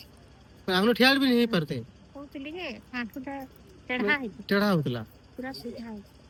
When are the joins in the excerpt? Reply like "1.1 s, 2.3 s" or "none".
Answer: none